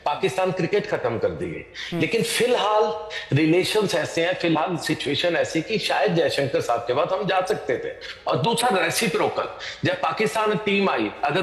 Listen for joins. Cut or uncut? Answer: uncut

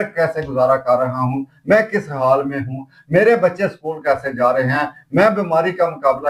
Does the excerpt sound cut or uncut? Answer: uncut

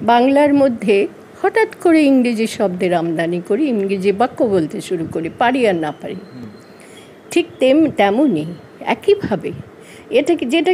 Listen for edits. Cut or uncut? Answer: uncut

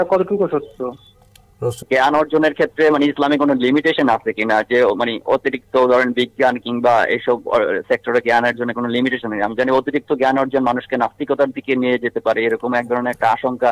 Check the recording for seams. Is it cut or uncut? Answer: cut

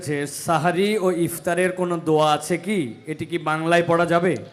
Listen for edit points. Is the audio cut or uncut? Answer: uncut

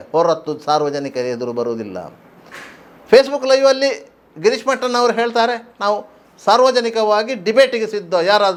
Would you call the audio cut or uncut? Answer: uncut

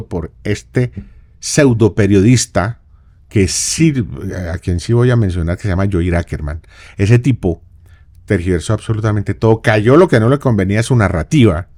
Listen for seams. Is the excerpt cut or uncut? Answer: uncut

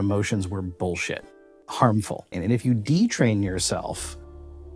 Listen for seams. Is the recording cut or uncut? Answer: cut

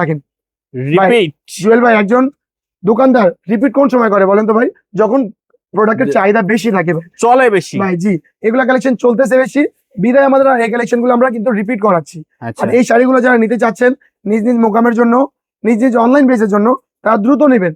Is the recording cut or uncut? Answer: uncut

